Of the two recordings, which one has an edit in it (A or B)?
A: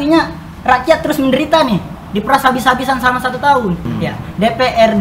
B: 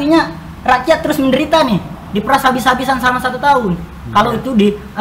A